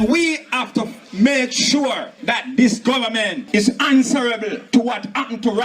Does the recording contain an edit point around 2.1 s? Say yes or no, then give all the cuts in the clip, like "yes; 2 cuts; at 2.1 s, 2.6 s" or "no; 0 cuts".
yes; 4 cuts; at 1.0 s, 2.1 s, 3.4 s, 4.6 s